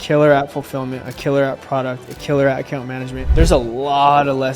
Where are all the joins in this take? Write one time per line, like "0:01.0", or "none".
0:03.3